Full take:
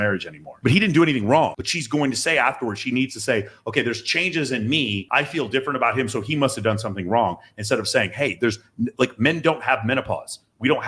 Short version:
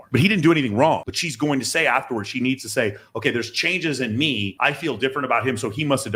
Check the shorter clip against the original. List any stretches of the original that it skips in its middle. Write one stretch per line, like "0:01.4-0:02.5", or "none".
none